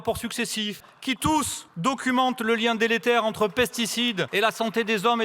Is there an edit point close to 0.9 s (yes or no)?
yes